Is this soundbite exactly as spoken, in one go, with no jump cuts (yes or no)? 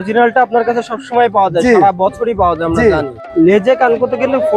no